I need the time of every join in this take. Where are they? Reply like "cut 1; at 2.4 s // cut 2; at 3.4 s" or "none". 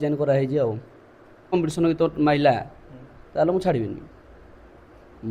cut 1; at 1.5 s